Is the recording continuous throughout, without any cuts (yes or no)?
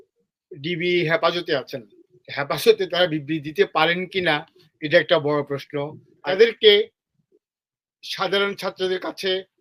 no